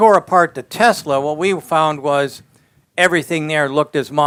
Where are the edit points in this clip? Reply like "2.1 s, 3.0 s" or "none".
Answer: none